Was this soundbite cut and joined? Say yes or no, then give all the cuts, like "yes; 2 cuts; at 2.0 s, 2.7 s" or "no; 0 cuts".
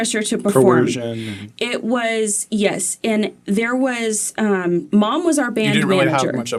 no; 0 cuts